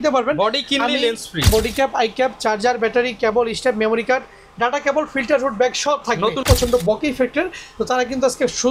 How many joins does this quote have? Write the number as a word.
two